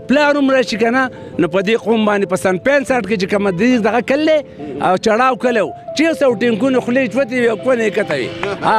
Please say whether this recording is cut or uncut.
uncut